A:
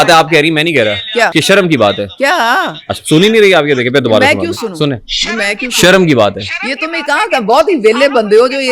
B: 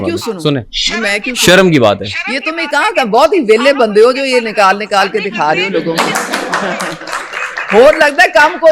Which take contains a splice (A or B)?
A